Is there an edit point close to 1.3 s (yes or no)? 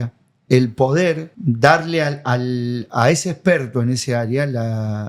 yes